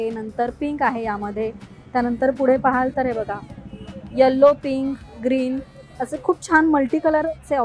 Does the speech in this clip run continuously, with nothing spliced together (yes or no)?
yes